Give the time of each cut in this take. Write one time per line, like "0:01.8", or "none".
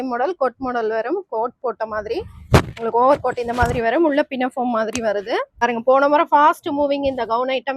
0:05.6

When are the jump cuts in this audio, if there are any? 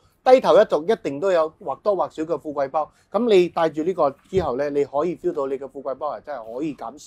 none

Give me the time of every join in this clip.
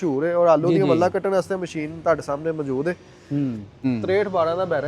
0:03.7

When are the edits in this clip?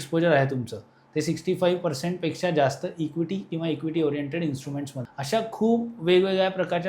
0:05.0

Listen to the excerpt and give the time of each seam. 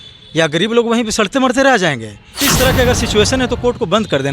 0:02.5

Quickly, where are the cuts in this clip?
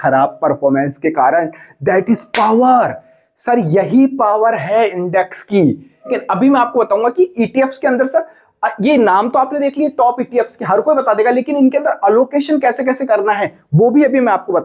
0:06.1

